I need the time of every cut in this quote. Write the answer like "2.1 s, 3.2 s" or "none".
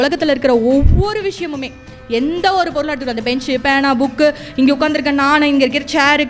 none